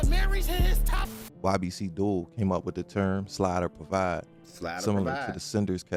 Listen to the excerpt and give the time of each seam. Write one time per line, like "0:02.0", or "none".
0:01.2